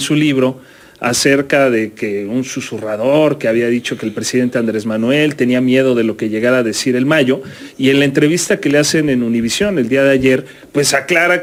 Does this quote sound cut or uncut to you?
uncut